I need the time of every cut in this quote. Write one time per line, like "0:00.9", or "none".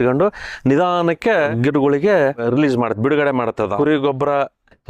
0:01.5
0:02.4
0:03.7